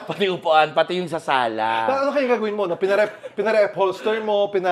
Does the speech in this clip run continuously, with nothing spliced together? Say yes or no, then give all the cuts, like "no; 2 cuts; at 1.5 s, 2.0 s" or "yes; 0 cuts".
yes; 0 cuts